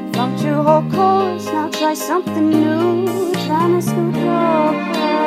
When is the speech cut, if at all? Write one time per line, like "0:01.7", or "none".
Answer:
none